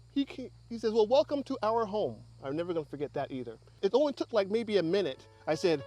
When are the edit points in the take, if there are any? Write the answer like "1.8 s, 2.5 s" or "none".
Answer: 3.8 s